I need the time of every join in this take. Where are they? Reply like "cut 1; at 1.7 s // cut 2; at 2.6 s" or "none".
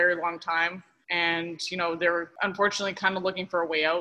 cut 1; at 0.9 s // cut 2; at 2.3 s